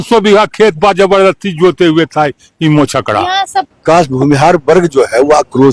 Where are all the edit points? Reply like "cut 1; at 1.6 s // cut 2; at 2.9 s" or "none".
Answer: cut 1; at 3.7 s